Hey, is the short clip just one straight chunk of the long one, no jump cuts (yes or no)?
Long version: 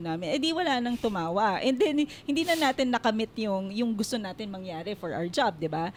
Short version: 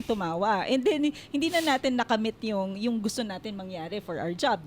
yes